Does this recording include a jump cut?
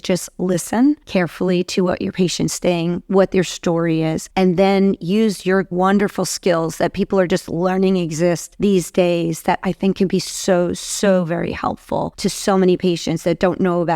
yes; 5 cuts; at 1.0 s, 4.2 s, 5.7 s, 8.5 s, 12.1 s

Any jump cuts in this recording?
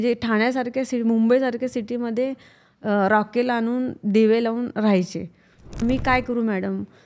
yes; 1 cut; at 5.8 s

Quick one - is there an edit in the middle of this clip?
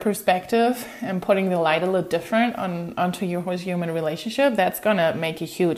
no; 0 cuts

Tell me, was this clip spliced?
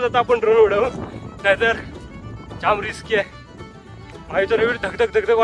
no; 0 cuts

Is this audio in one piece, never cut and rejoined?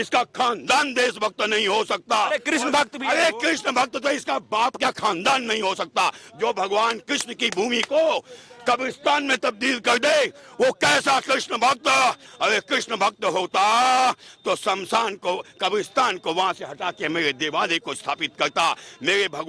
yes; 0 cuts

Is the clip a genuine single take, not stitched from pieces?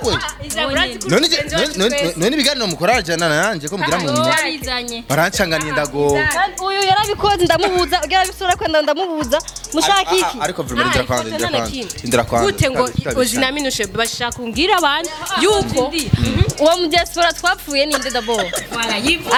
yes; 0 cuts

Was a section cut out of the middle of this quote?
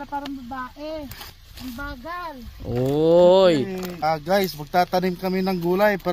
yes; 2 cuts; at 1.3 s, 3.9 s

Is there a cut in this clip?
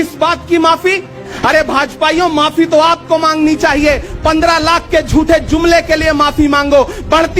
yes; 1 cut; at 1.3 s

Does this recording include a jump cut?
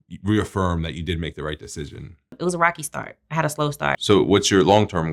yes; 2 cuts; at 2.4 s, 4.0 s

